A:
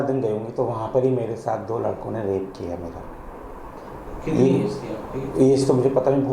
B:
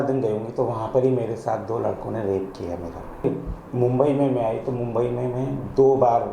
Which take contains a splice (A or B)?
B